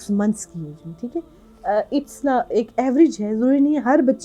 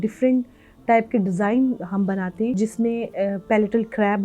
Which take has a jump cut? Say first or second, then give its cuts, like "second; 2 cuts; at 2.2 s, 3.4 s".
second; 1 cut; at 2.5 s